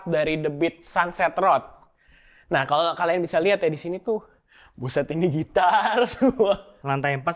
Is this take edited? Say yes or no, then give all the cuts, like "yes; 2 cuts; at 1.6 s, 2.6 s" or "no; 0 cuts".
no; 0 cuts